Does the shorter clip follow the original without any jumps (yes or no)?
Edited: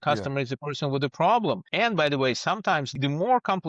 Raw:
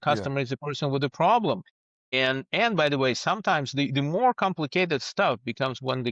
no